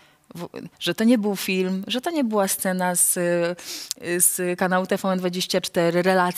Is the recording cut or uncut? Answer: uncut